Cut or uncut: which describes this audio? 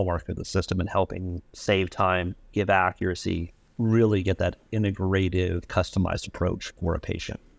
uncut